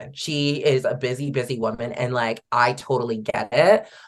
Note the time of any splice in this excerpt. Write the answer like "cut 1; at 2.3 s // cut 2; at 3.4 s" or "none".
none